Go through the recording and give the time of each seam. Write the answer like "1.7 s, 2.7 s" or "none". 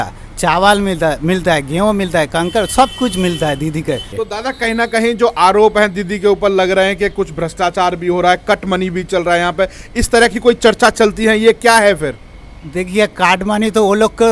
4.1 s